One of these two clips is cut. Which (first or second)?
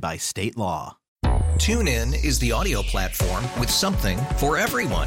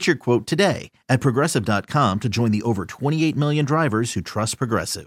first